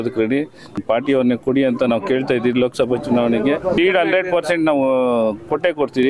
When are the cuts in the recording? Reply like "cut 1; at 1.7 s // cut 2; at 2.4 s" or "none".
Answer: cut 1; at 0.8 s // cut 2; at 3.8 s